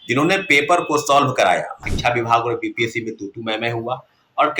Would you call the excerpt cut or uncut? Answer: cut